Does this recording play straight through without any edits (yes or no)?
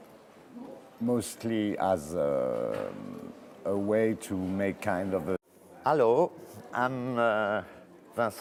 yes